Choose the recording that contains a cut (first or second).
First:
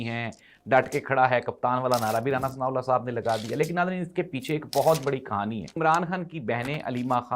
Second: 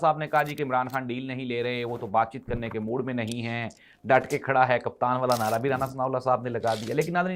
first